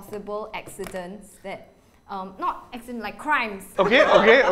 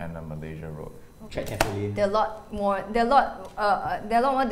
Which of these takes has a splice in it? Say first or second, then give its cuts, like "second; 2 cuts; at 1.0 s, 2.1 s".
first; 1 cut; at 3.6 s